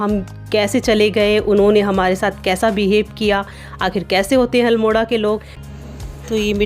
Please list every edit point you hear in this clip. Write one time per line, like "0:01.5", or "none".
0:05.5